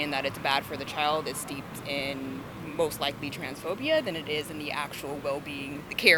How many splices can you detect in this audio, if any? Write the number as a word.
zero